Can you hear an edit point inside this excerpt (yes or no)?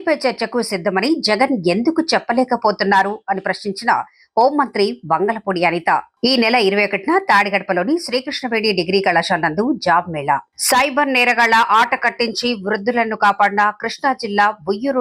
no